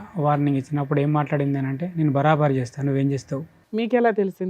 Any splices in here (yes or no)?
yes